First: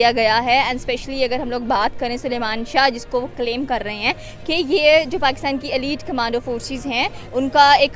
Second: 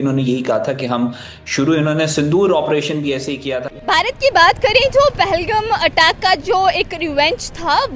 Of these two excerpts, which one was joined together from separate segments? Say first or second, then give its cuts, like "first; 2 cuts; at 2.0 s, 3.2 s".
second; 1 cut; at 3.4 s